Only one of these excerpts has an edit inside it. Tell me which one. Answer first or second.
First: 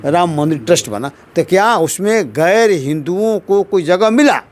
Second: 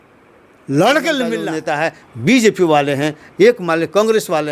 second